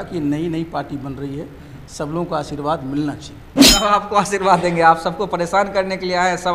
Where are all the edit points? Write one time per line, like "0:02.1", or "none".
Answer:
none